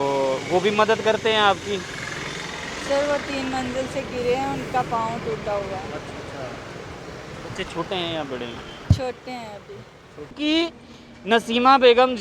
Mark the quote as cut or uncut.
cut